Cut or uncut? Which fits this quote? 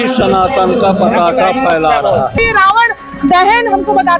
cut